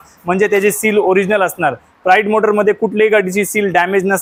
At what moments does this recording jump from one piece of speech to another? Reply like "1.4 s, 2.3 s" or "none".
none